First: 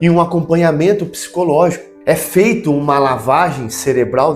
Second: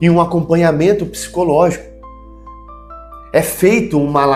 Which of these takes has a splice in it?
first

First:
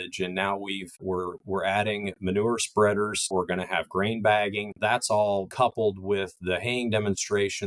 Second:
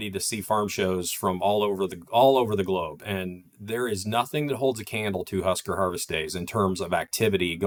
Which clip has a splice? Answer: first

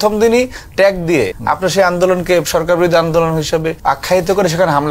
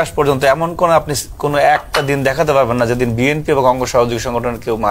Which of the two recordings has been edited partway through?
first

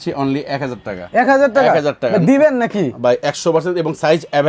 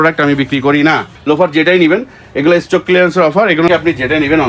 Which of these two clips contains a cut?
second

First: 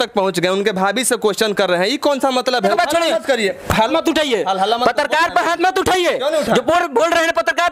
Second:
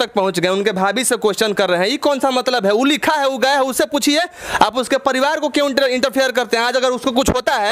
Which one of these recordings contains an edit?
first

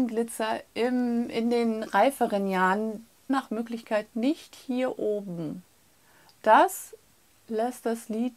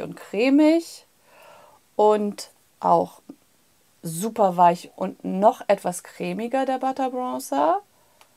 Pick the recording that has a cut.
first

